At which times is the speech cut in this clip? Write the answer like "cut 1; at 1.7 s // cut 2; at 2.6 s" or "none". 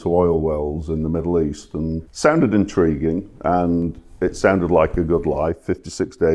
cut 1; at 2.1 s